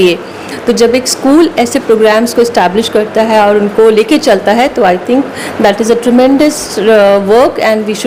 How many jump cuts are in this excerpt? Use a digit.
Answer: 0